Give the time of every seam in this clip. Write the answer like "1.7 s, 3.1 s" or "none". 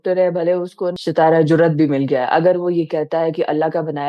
1.0 s